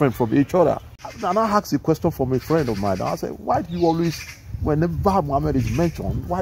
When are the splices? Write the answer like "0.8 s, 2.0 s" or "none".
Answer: 0.9 s